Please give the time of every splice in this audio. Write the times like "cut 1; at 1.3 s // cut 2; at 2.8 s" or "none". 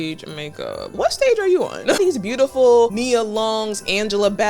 cut 1; at 0.9 s // cut 2; at 2.0 s // cut 3; at 2.9 s